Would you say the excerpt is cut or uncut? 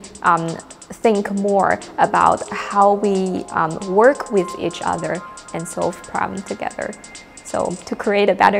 uncut